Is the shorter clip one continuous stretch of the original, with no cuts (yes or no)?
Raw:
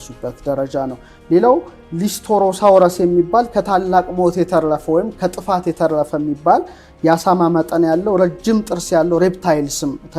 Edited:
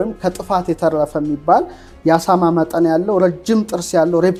yes